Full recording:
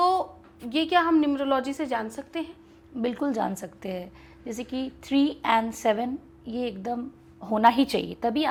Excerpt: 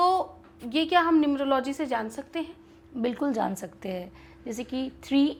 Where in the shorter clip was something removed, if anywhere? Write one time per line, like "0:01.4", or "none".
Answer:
none